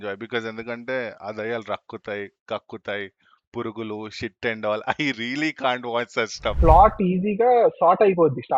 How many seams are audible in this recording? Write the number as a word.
one